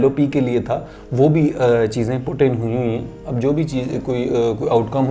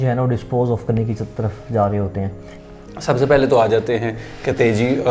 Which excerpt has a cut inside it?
second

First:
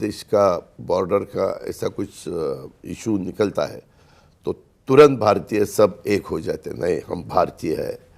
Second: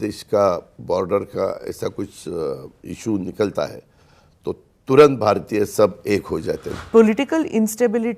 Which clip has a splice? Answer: second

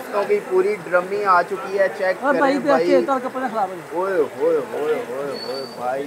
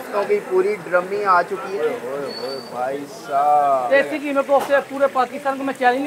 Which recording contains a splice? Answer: second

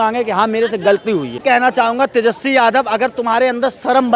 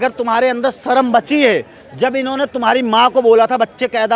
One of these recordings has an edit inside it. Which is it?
first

